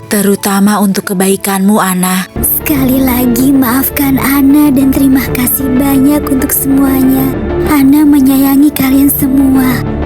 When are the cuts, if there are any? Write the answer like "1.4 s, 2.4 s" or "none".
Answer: 2.3 s